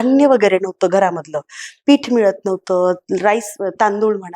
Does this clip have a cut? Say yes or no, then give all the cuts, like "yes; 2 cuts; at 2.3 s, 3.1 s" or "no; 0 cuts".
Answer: no; 0 cuts